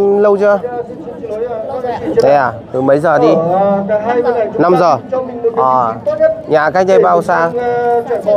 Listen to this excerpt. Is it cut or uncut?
uncut